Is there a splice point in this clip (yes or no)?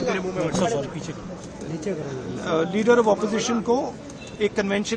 no